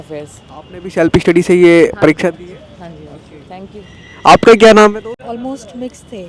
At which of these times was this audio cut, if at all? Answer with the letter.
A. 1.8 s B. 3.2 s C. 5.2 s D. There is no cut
C